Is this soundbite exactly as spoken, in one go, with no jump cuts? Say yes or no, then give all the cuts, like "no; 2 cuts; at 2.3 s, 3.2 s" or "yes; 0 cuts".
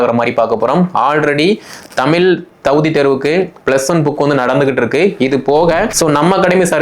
no; 1 cut; at 5.9 s